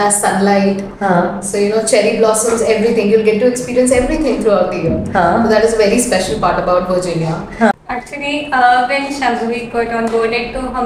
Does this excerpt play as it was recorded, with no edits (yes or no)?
no